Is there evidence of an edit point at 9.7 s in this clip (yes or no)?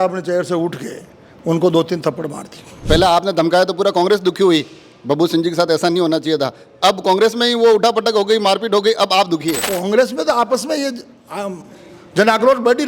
yes